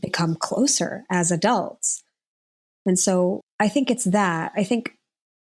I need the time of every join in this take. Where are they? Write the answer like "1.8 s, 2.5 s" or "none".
3.5 s